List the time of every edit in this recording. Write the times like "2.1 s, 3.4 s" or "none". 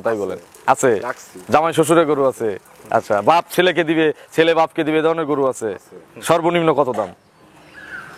none